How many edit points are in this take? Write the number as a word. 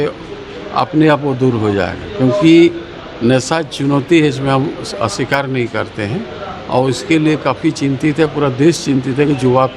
zero